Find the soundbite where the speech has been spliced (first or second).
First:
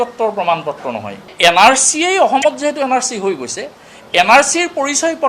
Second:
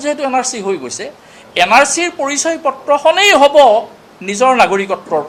first